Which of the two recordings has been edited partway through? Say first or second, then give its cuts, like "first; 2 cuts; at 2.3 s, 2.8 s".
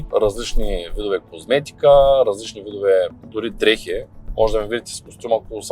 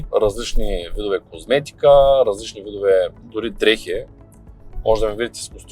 first; 1 cut; at 4.2 s